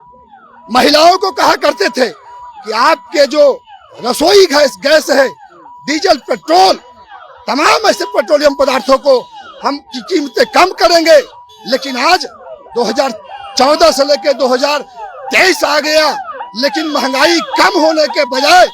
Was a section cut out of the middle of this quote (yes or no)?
no